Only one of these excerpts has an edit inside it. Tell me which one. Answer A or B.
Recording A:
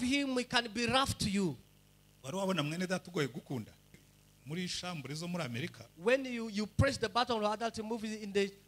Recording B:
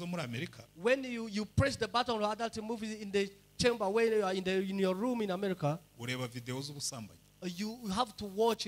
A